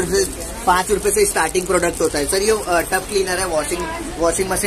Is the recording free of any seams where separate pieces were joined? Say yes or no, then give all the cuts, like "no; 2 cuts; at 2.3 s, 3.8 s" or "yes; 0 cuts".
yes; 0 cuts